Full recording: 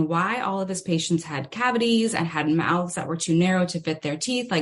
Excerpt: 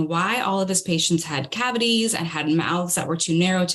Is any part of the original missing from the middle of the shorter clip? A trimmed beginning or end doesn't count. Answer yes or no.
no